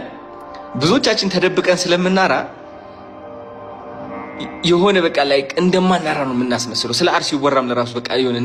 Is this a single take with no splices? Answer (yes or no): yes